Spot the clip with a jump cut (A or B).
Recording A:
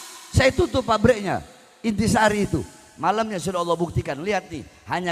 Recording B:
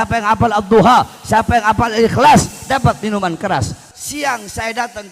B